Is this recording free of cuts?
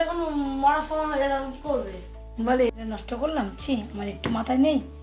yes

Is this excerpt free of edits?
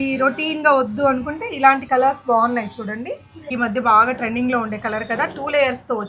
no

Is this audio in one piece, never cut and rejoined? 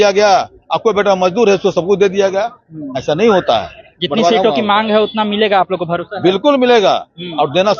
yes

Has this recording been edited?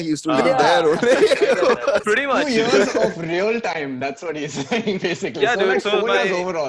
no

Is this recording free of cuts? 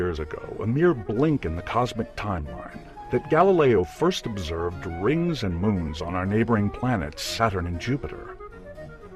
yes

